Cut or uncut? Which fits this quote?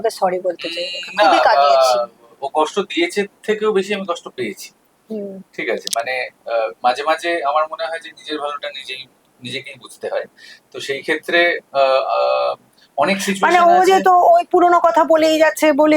uncut